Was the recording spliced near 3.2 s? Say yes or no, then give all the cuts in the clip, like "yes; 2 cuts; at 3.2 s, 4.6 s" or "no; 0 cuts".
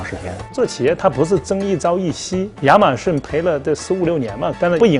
yes; 2 cuts; at 2.5 s, 3.2 s